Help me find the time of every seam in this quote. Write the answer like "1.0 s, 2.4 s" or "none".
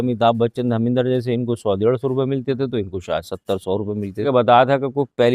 4.2 s